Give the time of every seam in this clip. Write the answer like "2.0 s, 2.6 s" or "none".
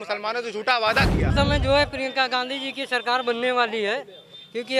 1.3 s